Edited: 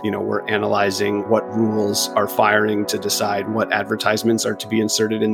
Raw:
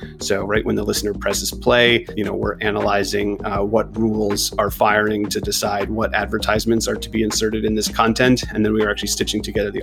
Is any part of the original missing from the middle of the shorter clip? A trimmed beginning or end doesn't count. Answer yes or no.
yes